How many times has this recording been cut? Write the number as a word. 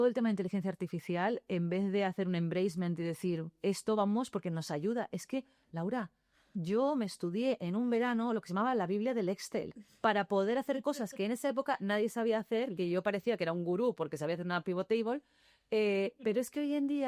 zero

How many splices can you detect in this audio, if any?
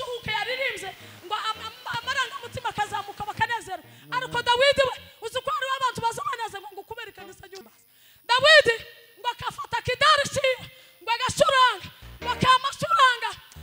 one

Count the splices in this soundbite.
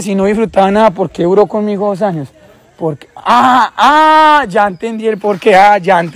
zero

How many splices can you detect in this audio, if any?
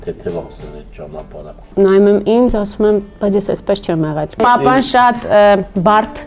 two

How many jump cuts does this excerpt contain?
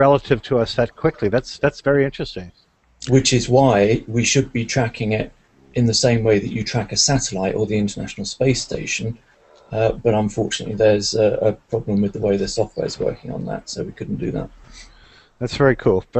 one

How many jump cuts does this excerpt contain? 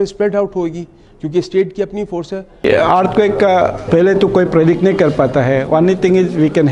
two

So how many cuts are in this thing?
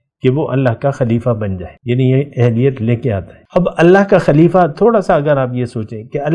two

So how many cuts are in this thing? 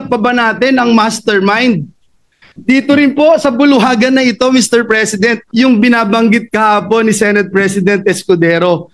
one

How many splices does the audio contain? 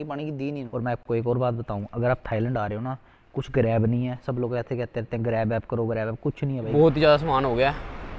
two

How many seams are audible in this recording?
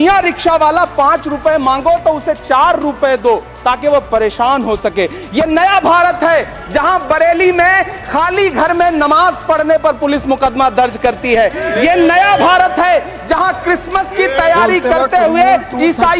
zero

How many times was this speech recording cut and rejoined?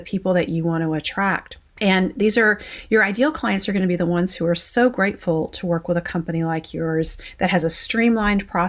one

